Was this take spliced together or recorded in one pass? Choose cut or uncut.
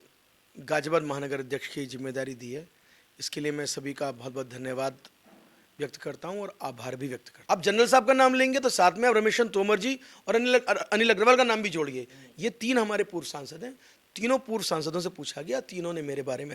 cut